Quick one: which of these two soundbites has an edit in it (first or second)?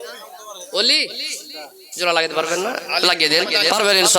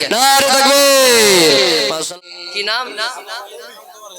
second